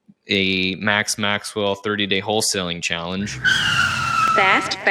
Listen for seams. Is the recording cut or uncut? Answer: uncut